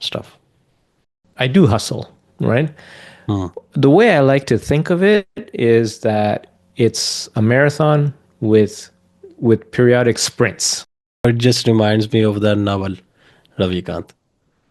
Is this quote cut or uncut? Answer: cut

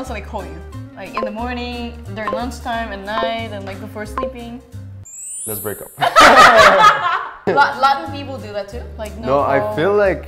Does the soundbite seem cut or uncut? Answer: uncut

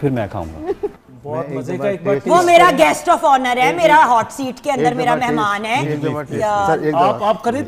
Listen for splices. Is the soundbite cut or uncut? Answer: cut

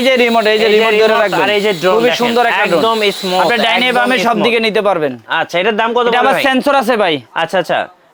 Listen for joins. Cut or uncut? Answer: uncut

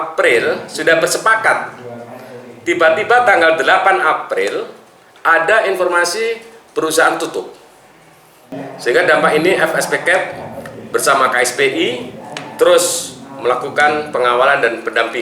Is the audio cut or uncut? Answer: cut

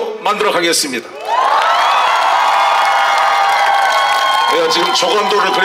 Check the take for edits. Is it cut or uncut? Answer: uncut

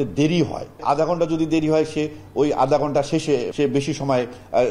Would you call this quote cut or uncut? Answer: cut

